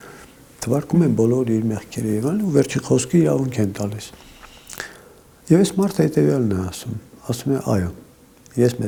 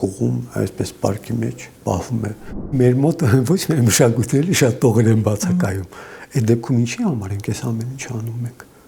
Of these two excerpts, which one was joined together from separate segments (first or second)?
second